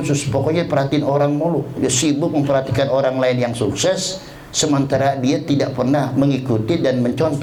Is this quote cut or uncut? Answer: uncut